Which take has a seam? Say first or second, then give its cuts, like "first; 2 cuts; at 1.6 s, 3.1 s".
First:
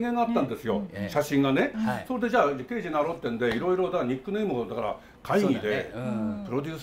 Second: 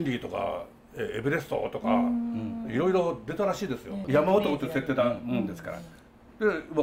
second; 1 cut; at 3.9 s